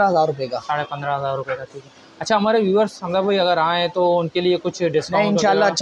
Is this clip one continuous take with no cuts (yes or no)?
yes